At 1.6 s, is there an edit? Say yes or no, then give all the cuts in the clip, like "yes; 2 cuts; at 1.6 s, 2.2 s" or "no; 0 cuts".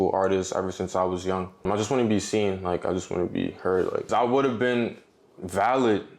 yes; 2 cuts; at 1.6 s, 4.1 s